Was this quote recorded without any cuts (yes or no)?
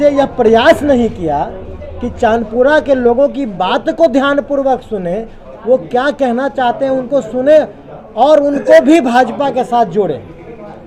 yes